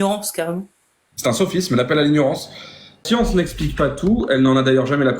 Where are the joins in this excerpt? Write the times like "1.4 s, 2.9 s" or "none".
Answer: 3.0 s